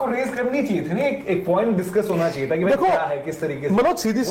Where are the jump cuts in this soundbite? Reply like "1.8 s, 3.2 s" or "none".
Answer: none